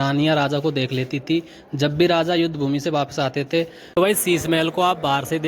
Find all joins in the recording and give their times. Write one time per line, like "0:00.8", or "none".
0:03.9